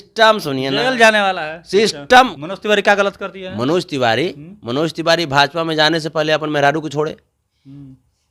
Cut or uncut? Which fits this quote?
cut